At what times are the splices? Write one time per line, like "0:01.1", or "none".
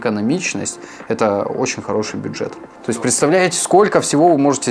0:02.7